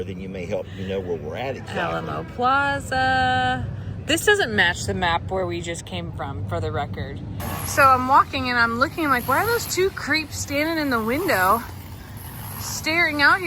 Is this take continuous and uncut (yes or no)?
no